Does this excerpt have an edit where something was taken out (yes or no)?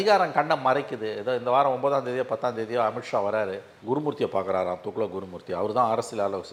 no